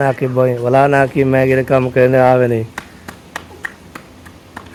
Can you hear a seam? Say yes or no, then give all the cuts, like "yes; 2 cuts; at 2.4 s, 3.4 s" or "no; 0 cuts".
no; 0 cuts